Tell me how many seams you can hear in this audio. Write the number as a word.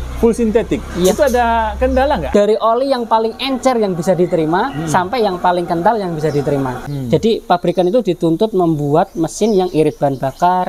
two